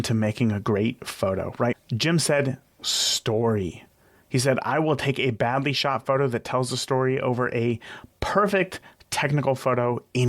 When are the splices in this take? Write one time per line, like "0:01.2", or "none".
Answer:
0:01.8